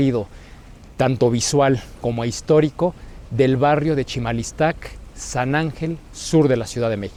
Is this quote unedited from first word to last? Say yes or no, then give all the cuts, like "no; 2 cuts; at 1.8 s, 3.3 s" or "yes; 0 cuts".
yes; 0 cuts